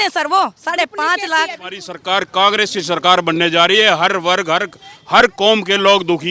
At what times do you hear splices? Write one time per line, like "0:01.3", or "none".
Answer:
0:01.9

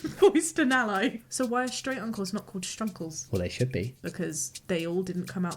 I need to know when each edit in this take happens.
0:01.2
0:03.2
0:04.1

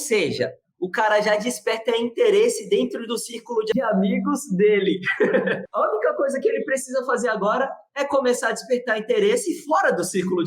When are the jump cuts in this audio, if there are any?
0:03.7
0:05.6

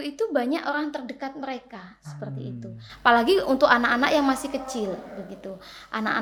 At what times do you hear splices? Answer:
none

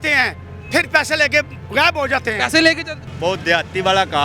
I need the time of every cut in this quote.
0:03.0

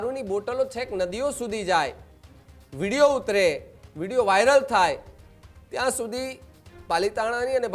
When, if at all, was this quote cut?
none

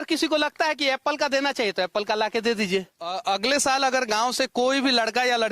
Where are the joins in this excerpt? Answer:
0:03.2

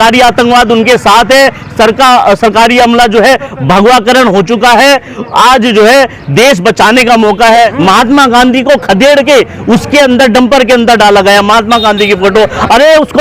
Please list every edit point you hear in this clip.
0:07.7

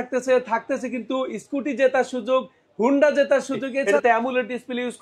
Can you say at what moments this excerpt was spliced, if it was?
0:03.7

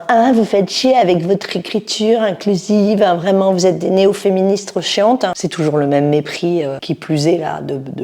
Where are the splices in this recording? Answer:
0:05.4
0:06.8

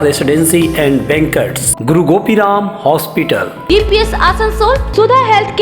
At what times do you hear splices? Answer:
0:01.6

